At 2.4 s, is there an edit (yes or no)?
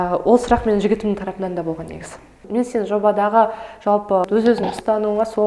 yes